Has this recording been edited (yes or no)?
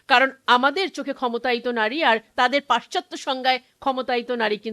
no